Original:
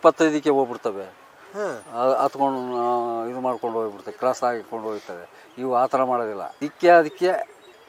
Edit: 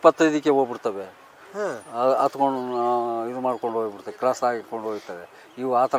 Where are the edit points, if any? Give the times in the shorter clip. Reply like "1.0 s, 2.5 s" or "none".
none